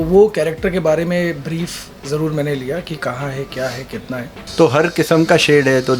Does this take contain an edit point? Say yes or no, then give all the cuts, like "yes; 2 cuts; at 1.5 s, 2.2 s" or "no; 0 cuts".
yes; 1 cut; at 4.4 s